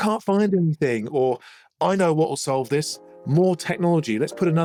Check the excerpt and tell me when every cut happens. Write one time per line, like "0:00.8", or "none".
none